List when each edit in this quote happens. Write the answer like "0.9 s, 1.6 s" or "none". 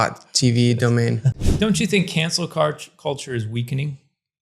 1.3 s